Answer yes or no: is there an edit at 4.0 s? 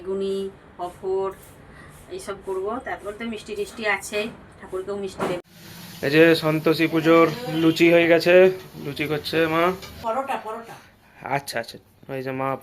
no